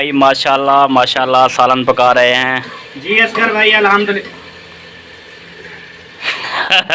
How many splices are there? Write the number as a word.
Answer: zero